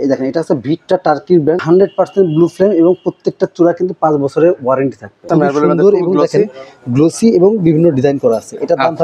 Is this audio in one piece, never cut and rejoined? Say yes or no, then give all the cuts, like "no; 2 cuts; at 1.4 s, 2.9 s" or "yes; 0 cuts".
no; 2 cuts; at 1.6 s, 5.2 s